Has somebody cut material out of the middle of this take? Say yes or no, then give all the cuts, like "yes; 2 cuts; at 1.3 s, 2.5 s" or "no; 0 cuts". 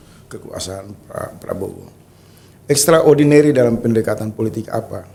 no; 0 cuts